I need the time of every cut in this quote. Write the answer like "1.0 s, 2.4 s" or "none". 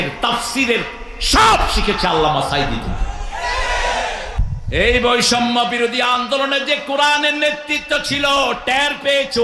4.4 s